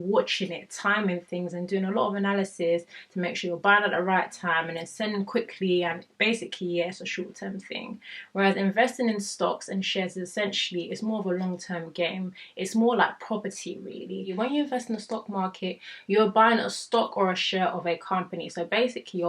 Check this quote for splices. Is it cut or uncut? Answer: cut